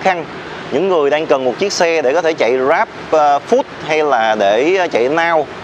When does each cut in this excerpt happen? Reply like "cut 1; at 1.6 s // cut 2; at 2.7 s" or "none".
none